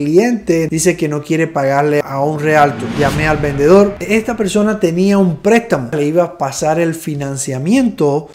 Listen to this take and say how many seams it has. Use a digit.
3